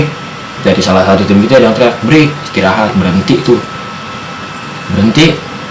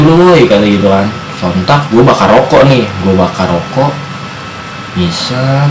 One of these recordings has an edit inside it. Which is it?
second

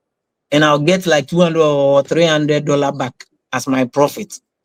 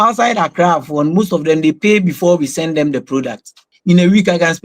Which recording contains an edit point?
second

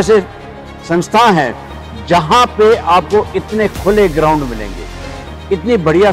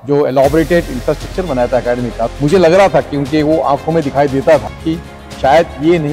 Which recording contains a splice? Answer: second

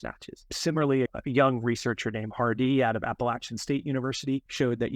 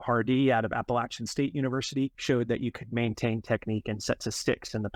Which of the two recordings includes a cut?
first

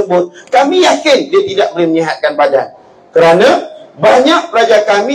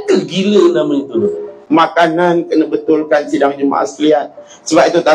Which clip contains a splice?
second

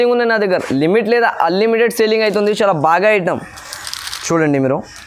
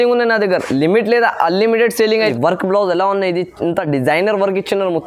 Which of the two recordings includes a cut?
second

